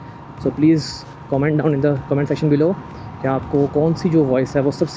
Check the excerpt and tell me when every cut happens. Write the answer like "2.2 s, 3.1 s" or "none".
none